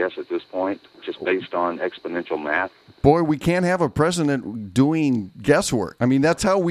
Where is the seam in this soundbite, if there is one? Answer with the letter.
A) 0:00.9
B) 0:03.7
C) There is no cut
A